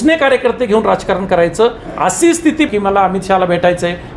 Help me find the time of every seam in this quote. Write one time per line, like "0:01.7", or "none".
0:02.7